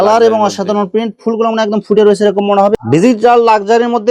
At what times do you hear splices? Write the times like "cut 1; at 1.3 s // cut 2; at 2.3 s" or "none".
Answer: cut 1; at 2.7 s